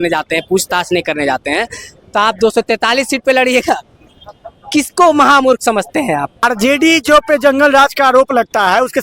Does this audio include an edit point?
yes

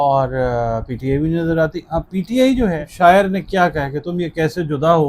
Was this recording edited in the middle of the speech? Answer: yes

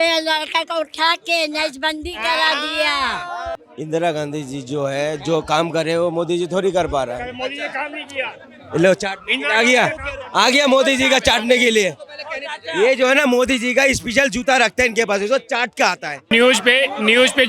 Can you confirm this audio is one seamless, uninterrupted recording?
no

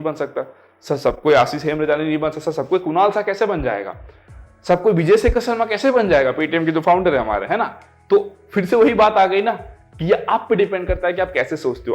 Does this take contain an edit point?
no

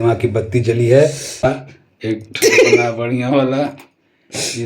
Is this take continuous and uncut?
no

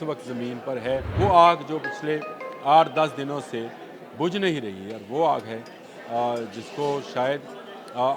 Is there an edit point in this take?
yes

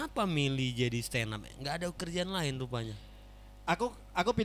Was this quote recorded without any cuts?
yes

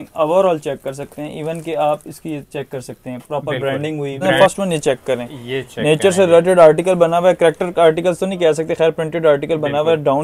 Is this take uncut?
no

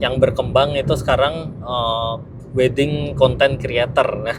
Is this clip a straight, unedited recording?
yes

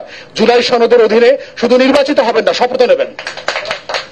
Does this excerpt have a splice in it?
no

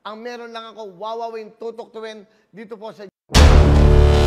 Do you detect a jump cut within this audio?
yes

